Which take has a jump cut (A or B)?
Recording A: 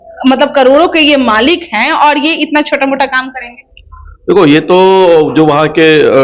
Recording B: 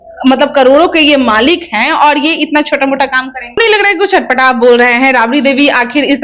B